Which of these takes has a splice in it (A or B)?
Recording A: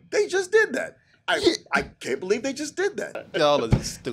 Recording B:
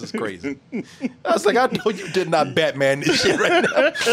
A